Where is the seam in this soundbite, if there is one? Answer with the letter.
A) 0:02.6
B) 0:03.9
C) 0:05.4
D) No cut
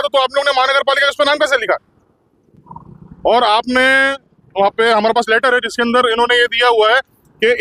D